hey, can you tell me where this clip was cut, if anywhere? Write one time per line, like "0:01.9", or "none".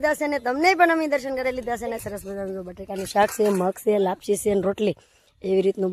0:02.0